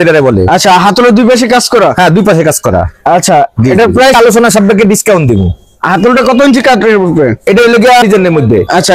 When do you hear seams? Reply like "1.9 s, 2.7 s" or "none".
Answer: 4.1 s, 8.0 s

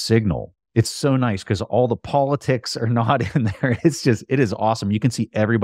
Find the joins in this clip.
none

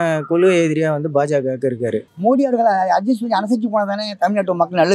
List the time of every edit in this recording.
2.1 s

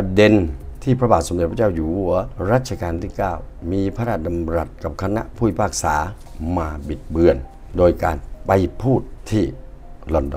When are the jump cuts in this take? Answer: 2.3 s, 6.2 s, 9.2 s

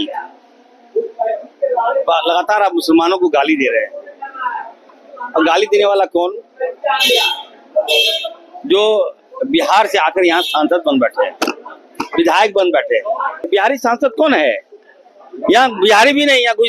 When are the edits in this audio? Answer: 13.5 s

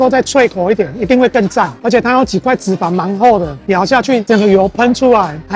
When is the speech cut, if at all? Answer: none

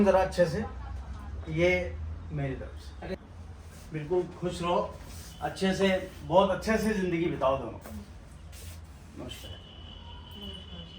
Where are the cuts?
3.1 s

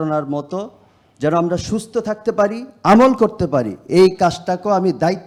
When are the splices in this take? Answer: none

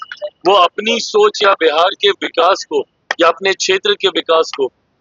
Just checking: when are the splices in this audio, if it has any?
none

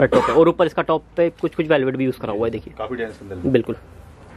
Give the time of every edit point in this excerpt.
none

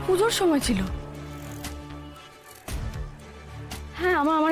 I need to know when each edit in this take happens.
none

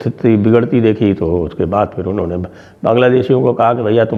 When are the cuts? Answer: none

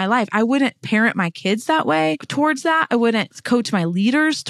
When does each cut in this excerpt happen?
2.2 s, 3.3 s

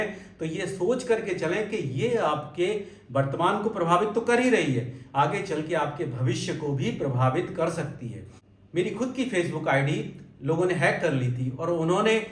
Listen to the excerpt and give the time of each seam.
8.5 s

